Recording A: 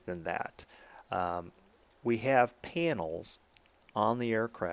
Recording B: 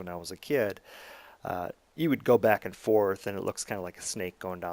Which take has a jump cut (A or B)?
B